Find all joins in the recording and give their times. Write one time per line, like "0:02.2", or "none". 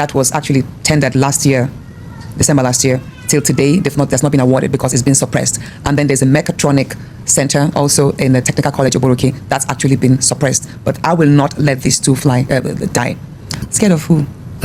0:13.6